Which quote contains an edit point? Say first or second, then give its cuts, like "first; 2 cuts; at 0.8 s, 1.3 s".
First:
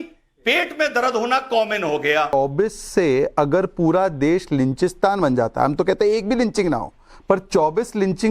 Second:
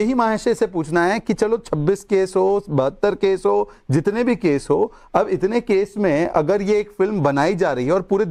first; 1 cut; at 2.3 s